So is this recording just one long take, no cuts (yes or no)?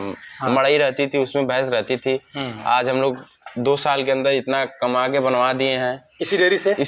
yes